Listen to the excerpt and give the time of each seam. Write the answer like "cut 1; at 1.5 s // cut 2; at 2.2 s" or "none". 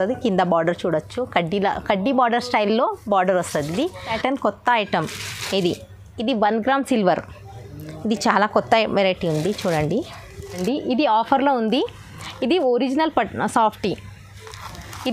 cut 1; at 4.2 s // cut 2; at 10.6 s